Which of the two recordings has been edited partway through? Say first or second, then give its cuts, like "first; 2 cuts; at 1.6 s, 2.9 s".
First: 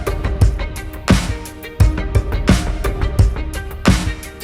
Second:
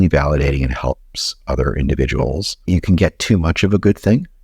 second; 1 cut; at 2.5 s